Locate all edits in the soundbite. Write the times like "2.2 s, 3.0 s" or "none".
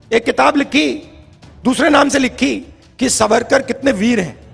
none